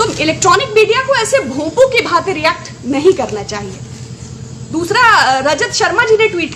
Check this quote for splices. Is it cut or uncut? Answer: uncut